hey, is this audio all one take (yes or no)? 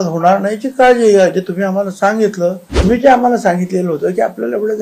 no